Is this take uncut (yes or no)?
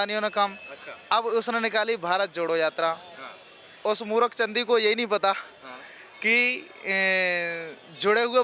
yes